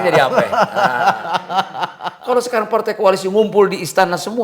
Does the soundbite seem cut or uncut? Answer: cut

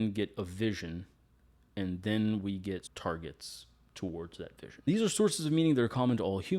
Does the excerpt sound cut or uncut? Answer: cut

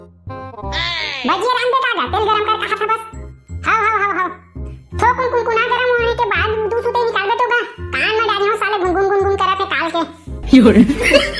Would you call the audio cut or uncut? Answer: uncut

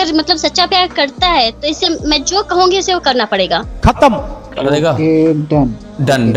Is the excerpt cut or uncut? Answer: uncut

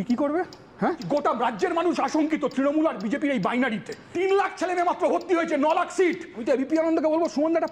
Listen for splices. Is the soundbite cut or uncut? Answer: cut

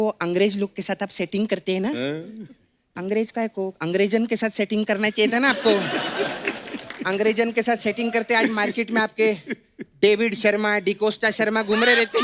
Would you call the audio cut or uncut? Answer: uncut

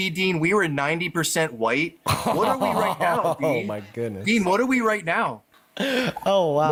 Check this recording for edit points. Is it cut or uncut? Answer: uncut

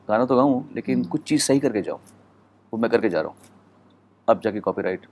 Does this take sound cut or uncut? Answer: uncut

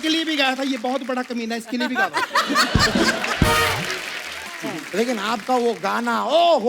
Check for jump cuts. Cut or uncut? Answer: cut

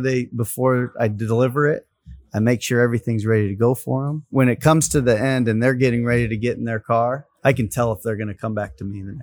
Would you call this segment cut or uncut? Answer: cut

